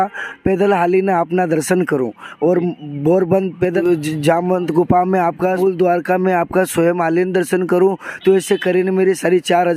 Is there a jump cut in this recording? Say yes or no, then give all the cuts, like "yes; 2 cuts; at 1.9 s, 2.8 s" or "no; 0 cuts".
yes; 2 cuts; at 3.8 s, 5.6 s